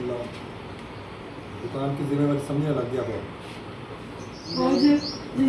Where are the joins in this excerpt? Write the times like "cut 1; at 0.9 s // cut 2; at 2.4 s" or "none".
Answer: cut 1; at 4.4 s